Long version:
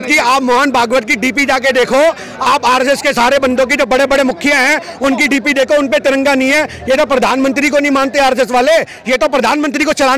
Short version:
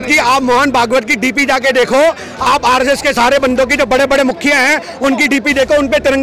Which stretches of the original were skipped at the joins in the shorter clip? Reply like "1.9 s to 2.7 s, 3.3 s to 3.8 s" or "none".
none